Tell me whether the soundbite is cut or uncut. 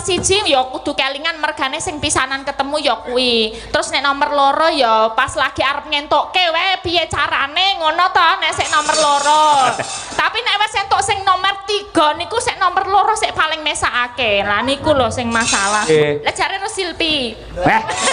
cut